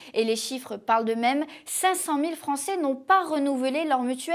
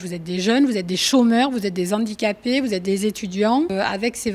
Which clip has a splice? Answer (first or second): second